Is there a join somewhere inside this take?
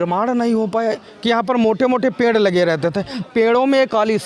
yes; 2 cuts; at 1.1 s, 3.2 s

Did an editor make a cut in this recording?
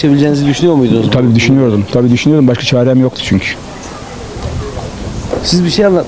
no; 0 cuts

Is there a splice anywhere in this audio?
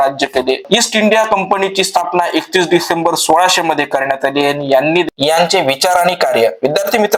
yes; 1 cut; at 5.1 s

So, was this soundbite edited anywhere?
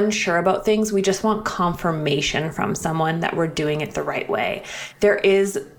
yes; 1 cut; at 4.8 s

